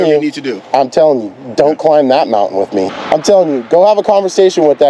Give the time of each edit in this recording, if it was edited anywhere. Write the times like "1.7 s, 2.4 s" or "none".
3.0 s